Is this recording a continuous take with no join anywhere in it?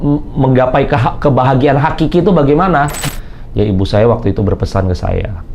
no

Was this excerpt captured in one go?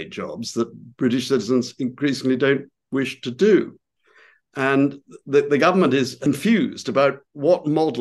no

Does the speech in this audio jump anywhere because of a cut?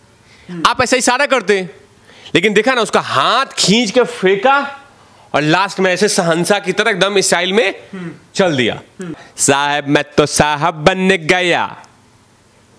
yes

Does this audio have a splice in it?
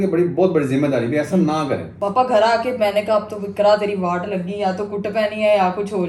yes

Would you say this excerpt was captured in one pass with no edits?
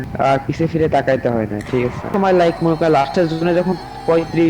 no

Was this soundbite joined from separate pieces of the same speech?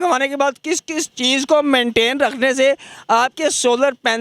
no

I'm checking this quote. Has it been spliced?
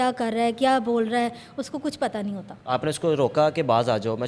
no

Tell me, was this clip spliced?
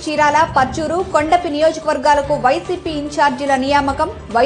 no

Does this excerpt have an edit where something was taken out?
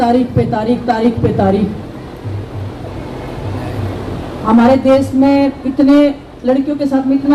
no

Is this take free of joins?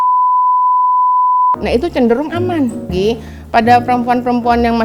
no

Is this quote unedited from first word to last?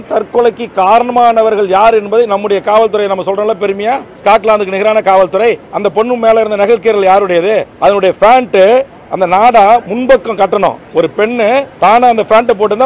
no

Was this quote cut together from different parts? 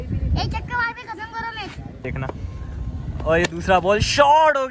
yes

